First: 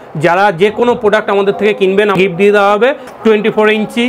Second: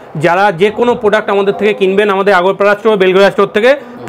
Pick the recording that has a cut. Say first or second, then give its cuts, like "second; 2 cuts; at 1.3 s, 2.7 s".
first; 2 cuts; at 2.1 s, 3.1 s